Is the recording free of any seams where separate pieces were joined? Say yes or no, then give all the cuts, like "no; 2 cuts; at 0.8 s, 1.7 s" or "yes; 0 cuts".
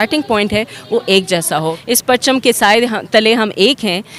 no; 1 cut; at 1.7 s